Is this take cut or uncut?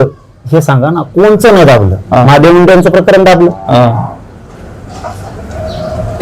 uncut